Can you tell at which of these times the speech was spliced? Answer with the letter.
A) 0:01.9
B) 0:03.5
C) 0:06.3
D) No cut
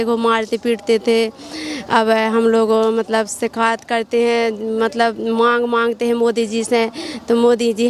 D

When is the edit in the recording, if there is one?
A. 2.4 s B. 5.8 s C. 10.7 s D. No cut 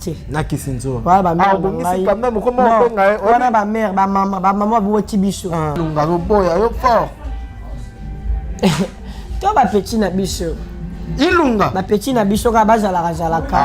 B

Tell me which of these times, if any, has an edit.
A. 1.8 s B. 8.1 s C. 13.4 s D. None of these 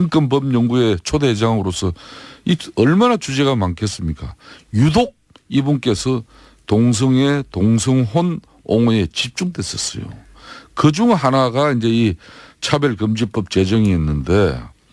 A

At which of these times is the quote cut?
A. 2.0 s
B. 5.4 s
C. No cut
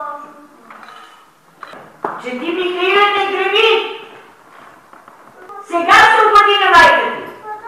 B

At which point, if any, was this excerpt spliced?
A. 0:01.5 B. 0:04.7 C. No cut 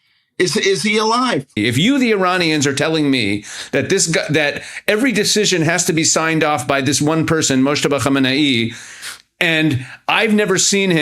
A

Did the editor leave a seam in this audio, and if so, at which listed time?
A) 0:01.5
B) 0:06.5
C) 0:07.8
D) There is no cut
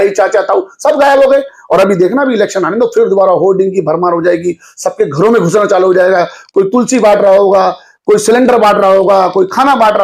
D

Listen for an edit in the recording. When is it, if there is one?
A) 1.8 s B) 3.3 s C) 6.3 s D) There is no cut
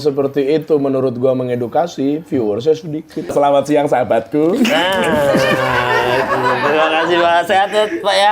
B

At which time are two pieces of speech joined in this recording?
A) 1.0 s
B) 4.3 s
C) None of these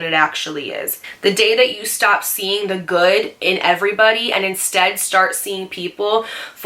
A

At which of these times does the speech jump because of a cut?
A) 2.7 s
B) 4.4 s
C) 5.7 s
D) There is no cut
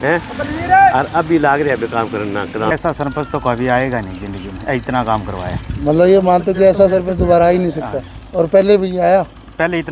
A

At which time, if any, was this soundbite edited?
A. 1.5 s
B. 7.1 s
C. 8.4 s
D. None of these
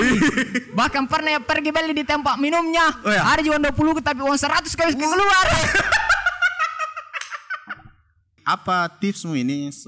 C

